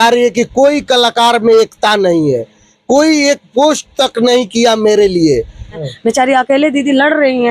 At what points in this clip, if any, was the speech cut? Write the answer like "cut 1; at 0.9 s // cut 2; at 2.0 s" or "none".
cut 1; at 6.0 s